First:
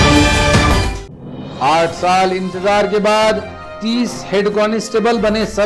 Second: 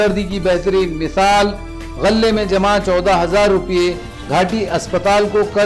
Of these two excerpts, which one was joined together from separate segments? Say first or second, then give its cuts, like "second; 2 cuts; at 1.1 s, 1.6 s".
first; 1 cut; at 1.0 s